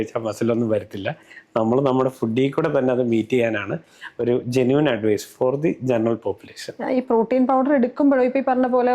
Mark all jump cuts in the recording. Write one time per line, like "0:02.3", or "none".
none